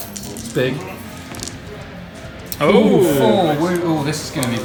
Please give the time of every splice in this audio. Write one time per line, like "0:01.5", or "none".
none

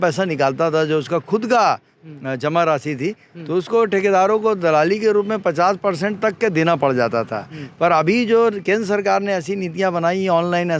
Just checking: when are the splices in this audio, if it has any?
none

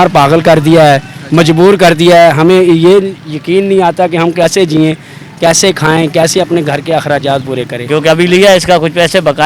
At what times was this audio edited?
0:07.8

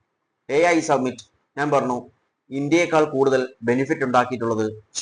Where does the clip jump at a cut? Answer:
none

